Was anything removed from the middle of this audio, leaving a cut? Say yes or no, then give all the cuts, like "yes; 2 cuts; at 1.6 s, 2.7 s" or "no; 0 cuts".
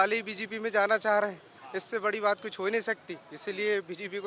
no; 0 cuts